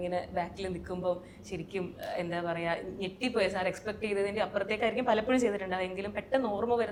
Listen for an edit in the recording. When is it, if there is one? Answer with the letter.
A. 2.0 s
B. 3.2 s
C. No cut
C